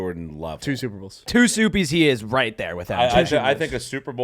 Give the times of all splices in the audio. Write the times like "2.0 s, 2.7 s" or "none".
1.3 s